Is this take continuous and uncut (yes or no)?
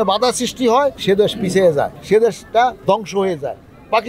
no